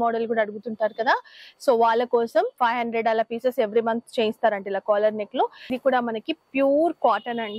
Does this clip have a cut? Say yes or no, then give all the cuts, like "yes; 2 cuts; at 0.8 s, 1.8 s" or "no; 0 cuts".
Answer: yes; 2 cuts; at 2.5 s, 5.7 s